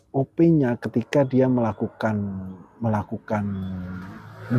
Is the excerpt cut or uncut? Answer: uncut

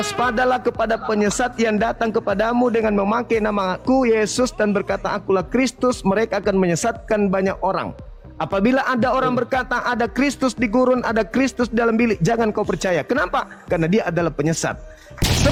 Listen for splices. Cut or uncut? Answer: uncut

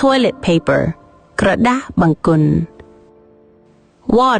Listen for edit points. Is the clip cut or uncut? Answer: cut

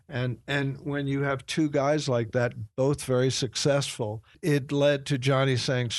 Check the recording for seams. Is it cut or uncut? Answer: cut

